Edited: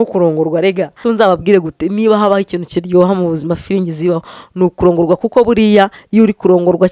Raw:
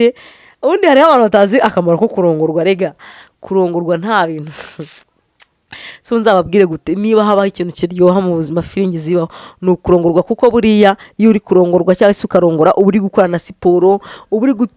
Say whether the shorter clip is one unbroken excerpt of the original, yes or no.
no